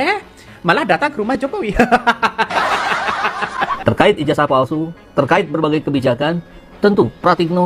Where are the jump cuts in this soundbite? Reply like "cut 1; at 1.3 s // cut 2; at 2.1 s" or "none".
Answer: cut 1; at 3.5 s